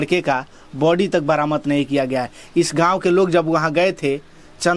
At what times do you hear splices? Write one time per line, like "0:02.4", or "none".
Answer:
none